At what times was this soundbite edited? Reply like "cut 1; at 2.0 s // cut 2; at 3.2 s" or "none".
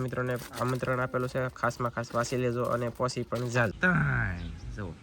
cut 1; at 3.8 s